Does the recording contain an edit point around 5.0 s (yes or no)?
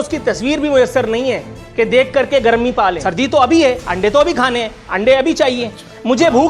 no